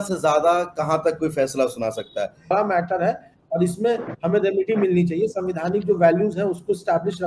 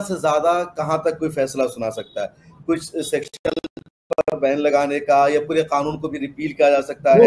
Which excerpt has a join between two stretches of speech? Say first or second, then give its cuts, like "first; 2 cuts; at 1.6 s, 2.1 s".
first; 1 cut; at 2.5 s